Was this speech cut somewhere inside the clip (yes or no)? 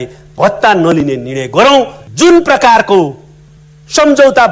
yes